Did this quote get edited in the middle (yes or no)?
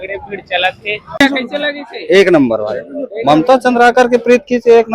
yes